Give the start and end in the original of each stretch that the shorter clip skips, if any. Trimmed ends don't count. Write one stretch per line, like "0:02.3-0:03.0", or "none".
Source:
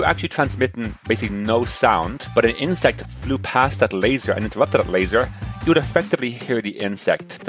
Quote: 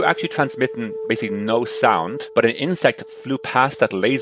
none